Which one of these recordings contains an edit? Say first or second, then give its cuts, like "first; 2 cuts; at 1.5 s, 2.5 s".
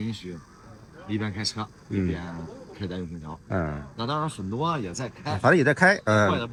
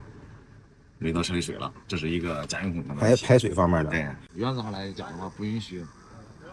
second; 1 cut; at 4.3 s